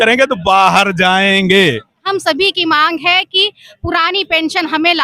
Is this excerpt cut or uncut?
cut